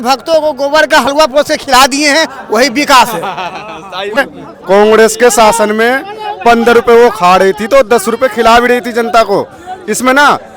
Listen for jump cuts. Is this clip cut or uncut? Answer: cut